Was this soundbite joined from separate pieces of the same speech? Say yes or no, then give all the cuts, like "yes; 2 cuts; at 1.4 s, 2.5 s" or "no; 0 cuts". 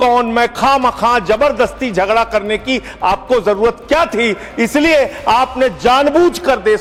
no; 0 cuts